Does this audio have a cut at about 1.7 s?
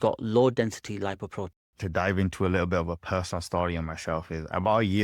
yes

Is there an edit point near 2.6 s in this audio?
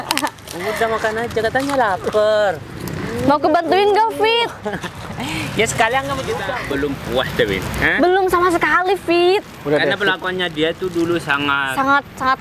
no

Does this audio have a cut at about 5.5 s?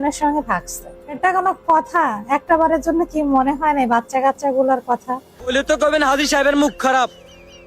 yes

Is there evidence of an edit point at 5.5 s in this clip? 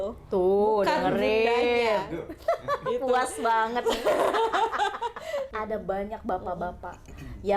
yes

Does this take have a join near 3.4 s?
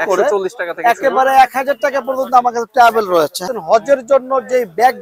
yes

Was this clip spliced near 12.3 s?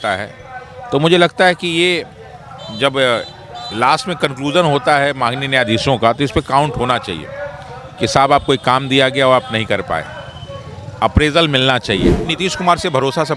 yes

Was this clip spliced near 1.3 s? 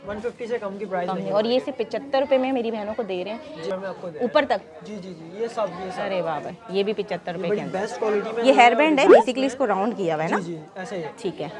no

